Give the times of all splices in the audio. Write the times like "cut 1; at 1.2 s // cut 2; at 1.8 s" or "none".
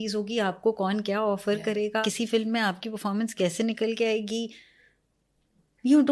cut 1; at 2.1 s

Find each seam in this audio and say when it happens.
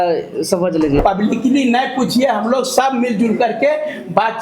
cut 1; at 1.0 s

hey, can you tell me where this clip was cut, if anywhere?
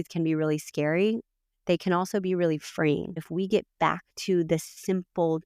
cut 1; at 3.3 s

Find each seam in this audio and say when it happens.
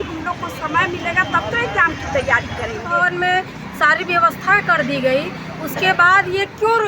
cut 1; at 2.8 s

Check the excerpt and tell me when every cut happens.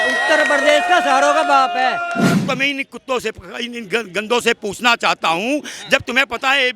cut 1; at 2.3 s

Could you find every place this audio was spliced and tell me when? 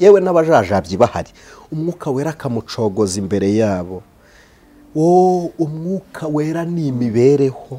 none

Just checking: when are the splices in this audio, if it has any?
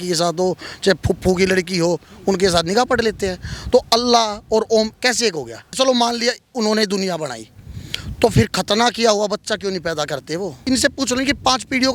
cut 1; at 5.7 s // cut 2; at 10.6 s

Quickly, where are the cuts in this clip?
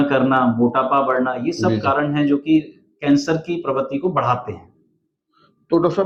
none

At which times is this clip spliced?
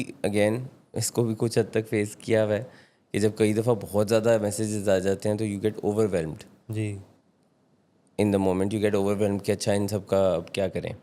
none

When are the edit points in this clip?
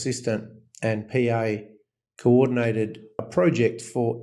cut 1; at 3.2 s

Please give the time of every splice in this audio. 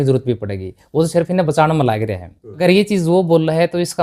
cut 1; at 2.6 s

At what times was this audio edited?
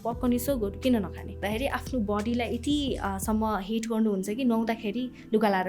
cut 1; at 1.4 s

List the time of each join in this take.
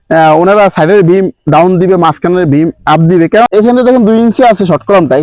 cut 1; at 3.5 s

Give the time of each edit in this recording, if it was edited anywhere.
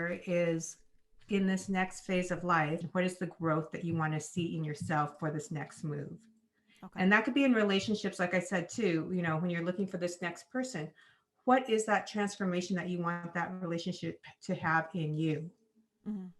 cut 1; at 2.8 s

